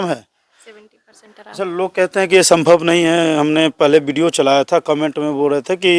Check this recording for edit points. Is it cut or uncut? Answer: uncut